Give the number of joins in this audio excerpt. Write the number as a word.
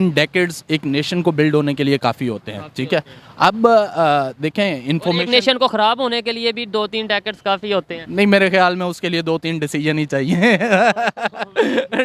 zero